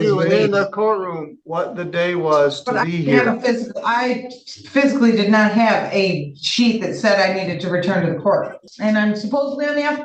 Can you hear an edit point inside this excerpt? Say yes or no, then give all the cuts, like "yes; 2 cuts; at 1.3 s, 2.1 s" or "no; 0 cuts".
yes; 1 cut; at 8.6 s